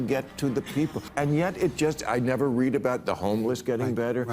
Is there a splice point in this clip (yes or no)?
yes